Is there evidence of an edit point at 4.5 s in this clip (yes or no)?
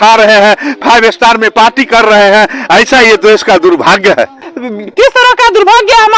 yes